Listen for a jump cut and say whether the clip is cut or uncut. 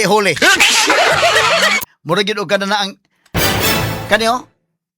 cut